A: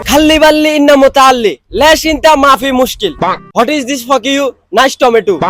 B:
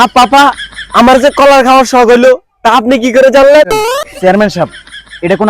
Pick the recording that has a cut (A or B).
B